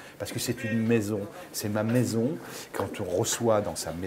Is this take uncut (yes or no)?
no